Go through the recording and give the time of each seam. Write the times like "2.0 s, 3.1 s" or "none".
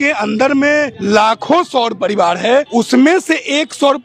0.9 s, 2.7 s